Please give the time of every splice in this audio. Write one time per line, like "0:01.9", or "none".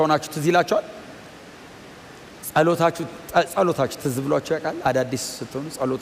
none